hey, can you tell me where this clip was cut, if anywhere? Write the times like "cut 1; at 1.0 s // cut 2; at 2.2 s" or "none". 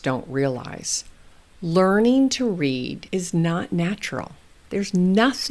cut 1; at 3.0 s